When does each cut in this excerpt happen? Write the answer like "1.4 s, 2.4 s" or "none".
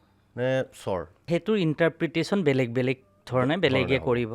1.3 s